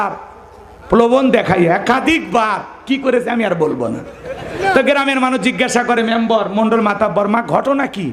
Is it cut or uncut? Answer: uncut